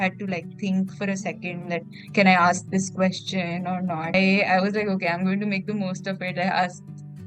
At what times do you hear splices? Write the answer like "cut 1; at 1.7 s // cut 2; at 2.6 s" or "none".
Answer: cut 1; at 4.1 s